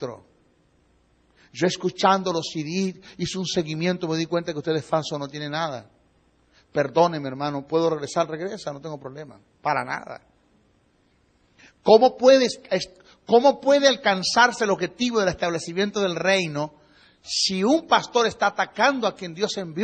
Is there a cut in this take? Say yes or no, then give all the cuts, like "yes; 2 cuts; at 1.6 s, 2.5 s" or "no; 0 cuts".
no; 0 cuts